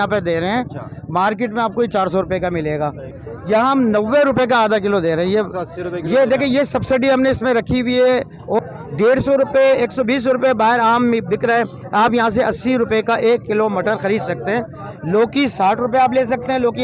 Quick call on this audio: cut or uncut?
cut